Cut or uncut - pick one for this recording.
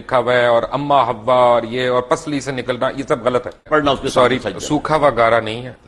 cut